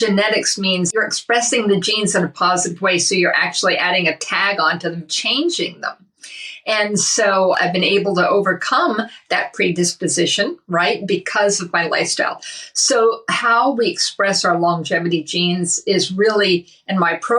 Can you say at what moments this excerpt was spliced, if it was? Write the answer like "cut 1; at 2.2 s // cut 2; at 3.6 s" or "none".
cut 1; at 0.9 s // cut 2; at 7.6 s